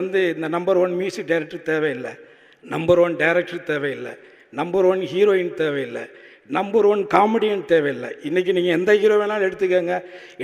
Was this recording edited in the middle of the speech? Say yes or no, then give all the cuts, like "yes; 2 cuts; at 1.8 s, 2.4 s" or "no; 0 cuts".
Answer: no; 0 cuts